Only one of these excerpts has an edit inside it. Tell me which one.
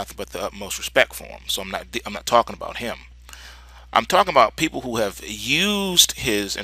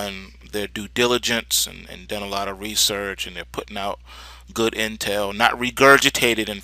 second; 1 cut; at 2.8 s

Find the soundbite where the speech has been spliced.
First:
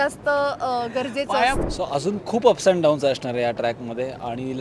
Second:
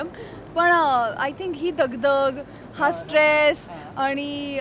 first; 1 cut; at 1.6 s

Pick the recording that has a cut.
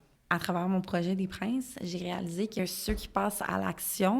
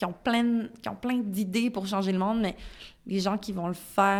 first; 1 cut; at 2.6 s

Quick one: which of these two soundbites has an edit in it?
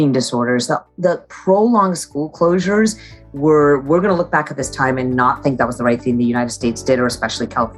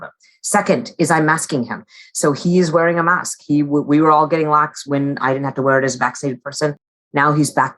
second; 1 cut; at 4.8 s

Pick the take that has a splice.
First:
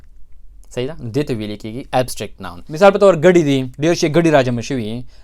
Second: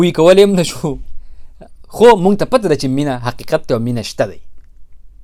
first; 1 cut; at 2.6 s

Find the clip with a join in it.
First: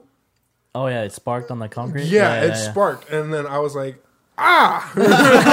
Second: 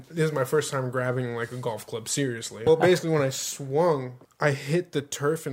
second; 2 cuts; at 2.7 s, 4.2 s

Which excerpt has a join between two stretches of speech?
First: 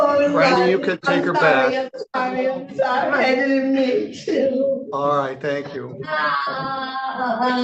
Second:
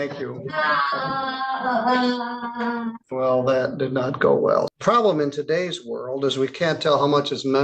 second; 2 cuts; at 3.0 s, 4.7 s

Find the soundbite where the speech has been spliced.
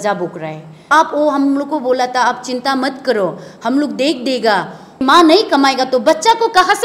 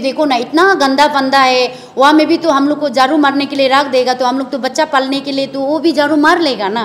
first; 2 cuts; at 0.9 s, 4.9 s

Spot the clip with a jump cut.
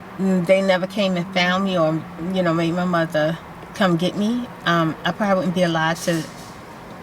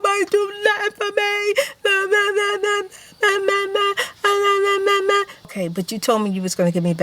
second; 1 cut; at 5.5 s

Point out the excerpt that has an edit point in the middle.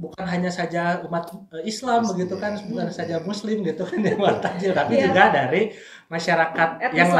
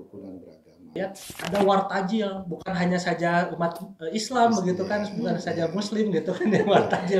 second; 1 cut; at 0.9 s

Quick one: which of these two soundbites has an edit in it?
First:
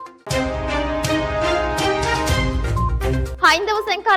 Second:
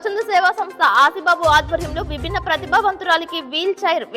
first; 1 cut; at 3.3 s

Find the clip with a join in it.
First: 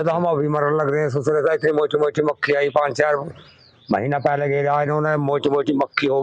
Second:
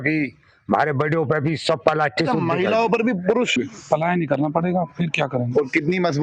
second; 1 cut; at 3.5 s

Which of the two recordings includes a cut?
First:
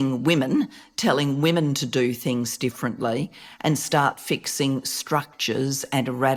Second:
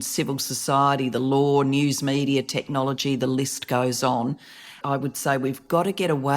second; 1 cut; at 4.7 s

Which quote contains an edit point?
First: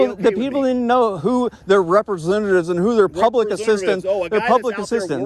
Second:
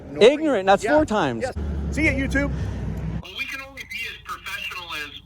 second; 2 cuts; at 1.5 s, 3.3 s

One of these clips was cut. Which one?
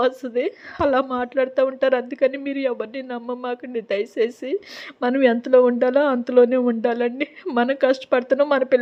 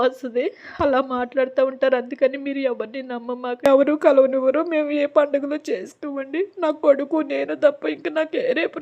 second; 1 cut; at 3.7 s

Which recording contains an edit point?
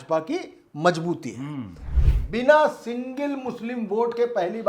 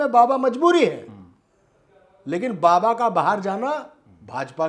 first; 1 cut; at 1.9 s

